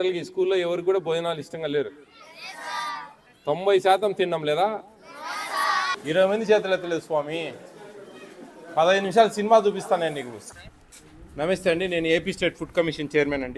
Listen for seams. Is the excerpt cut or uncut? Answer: cut